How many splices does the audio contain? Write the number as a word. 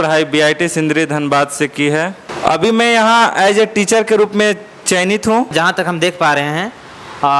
two